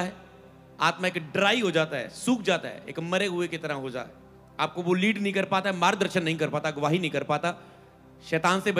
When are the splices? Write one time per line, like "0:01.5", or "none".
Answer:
none